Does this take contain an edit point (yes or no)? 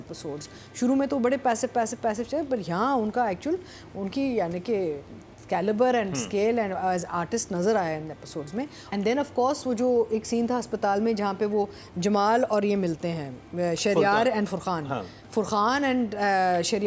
yes